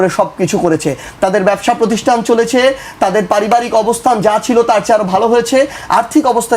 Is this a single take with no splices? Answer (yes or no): yes